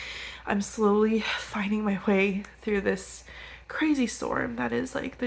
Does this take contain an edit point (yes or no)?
no